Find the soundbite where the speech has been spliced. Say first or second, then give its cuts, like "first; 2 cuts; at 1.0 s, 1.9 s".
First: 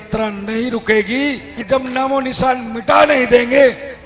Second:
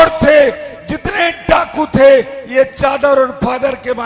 first; 1 cut; at 1.5 s